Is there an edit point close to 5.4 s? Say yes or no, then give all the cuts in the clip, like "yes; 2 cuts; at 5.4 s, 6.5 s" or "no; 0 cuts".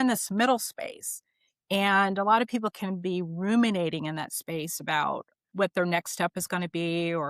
yes; 1 cut; at 5.4 s